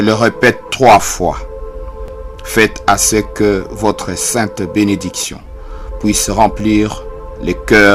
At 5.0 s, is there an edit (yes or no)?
no